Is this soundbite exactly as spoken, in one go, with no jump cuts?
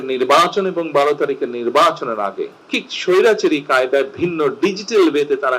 no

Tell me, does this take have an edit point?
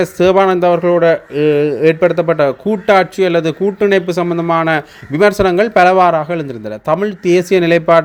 no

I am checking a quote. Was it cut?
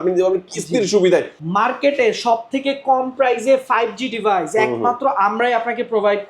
yes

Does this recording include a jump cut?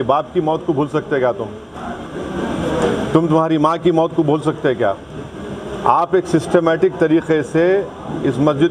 no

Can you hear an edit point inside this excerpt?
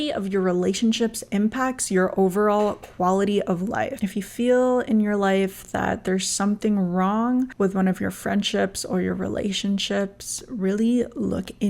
no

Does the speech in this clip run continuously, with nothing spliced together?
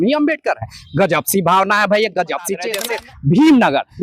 no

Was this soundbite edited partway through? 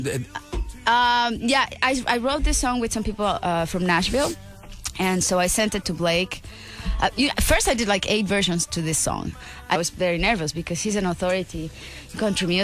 no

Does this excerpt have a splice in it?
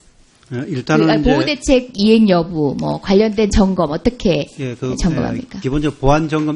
yes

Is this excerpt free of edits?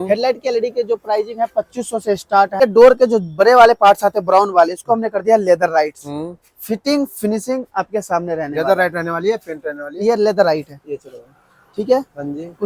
no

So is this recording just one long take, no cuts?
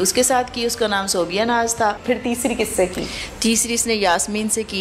no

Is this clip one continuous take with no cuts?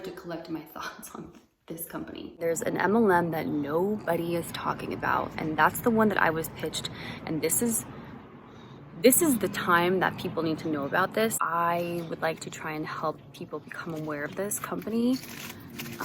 no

